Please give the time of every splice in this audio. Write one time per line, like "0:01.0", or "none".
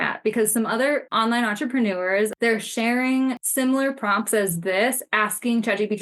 0:01.1
0:02.3
0:03.4